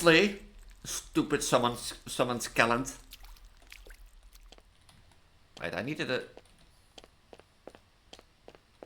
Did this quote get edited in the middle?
yes; 1 cut; at 4.3 s

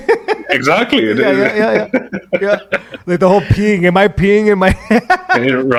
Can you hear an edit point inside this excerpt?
no; 0 cuts

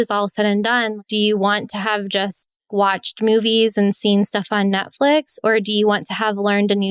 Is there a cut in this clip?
yes; 2 cuts; at 0.9 s, 2.7 s

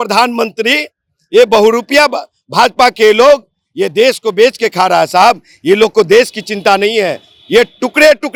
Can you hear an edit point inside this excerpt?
no; 0 cuts

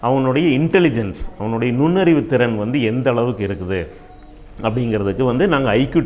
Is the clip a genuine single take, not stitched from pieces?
yes; 0 cuts

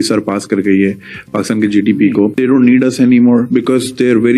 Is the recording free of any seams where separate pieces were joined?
no; 1 cut; at 2.4 s

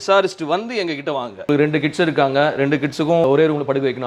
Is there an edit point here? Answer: yes; 1 cut; at 1.5 s

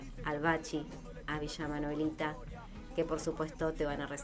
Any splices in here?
no; 0 cuts

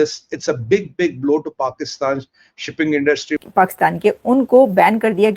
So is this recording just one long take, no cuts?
no; 1 cut; at 3.4 s

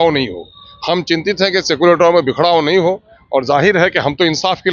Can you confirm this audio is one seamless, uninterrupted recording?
yes; 0 cuts

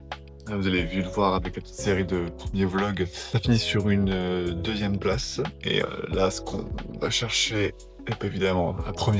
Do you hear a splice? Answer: no; 0 cuts

